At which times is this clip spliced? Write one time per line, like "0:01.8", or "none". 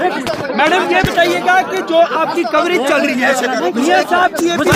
none